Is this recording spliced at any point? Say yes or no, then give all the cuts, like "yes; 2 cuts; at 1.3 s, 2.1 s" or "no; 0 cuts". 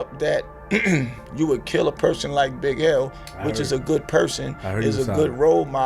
no; 0 cuts